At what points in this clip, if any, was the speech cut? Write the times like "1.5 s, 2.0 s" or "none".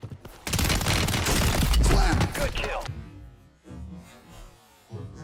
none

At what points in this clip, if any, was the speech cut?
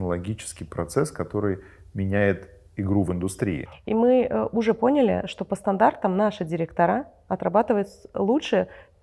3.7 s

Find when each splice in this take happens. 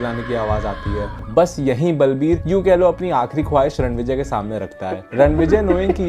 1.1 s, 5.0 s

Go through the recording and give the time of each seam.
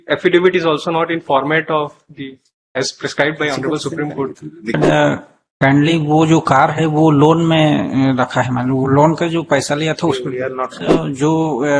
4.8 s, 10.8 s

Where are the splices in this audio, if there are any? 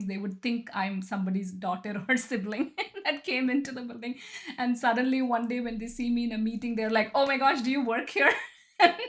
none

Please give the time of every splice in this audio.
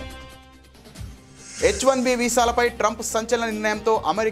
1.6 s

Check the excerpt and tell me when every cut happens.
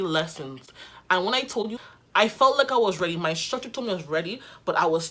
1.8 s

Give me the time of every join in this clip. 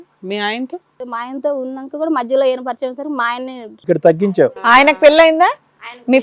1.0 s, 3.7 s

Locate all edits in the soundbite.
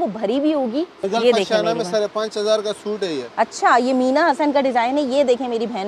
1.0 s

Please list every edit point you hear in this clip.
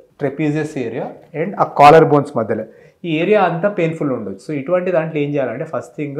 none

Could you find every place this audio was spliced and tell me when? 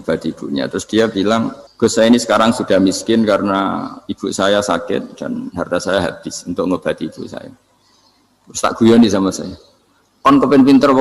1.6 s

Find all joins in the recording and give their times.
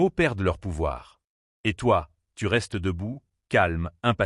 none

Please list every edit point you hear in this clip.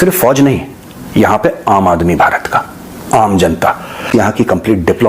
4.1 s

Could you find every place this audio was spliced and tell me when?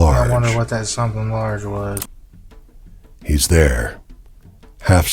2.0 s

